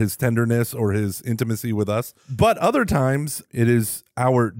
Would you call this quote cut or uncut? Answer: cut